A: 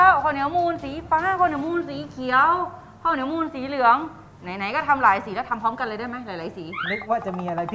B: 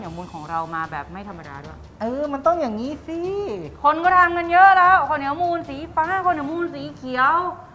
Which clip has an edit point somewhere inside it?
B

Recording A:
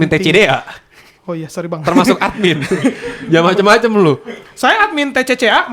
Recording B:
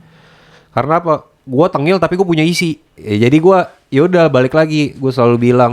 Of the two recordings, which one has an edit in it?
B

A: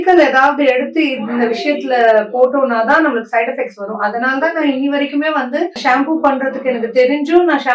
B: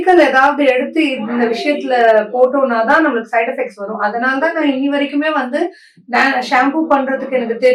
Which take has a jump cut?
A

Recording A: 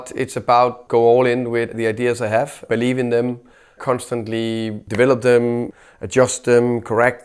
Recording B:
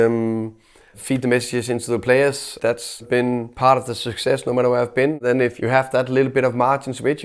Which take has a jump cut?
B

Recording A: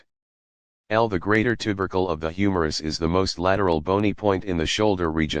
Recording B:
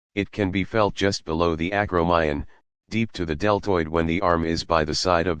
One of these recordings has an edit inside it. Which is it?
B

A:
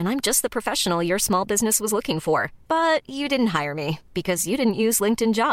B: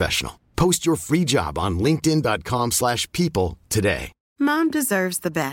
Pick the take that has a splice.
B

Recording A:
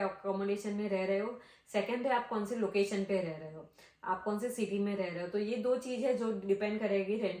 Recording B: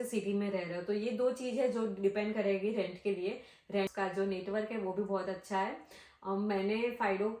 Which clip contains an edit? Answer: B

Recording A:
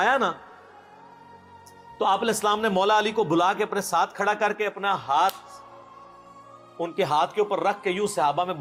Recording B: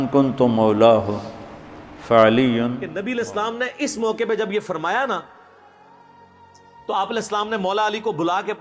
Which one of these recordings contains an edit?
B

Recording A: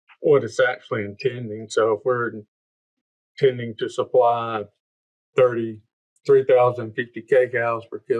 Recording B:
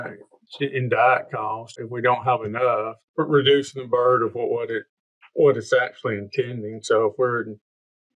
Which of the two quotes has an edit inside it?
B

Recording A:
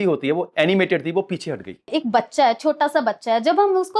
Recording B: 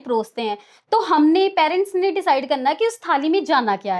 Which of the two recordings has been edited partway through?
A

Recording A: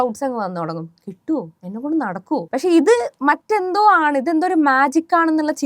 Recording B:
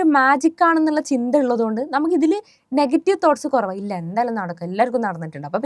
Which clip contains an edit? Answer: A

